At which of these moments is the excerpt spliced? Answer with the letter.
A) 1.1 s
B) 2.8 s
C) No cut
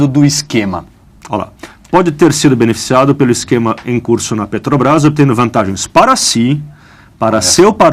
B